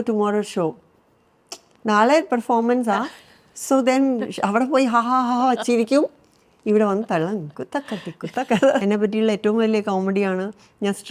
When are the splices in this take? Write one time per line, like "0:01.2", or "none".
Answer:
0:08.8